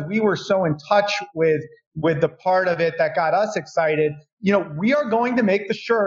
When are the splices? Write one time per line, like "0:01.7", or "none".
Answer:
0:04.2